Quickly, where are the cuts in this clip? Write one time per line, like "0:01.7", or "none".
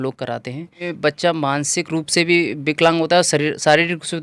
0:00.9